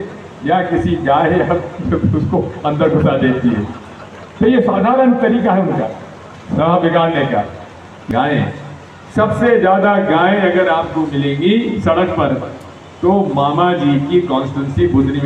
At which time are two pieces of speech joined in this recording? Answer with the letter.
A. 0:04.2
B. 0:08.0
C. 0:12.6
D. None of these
B